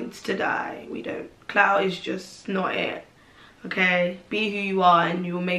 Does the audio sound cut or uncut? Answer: uncut